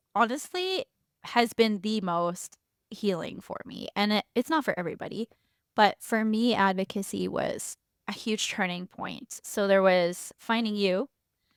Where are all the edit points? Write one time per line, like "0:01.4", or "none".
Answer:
none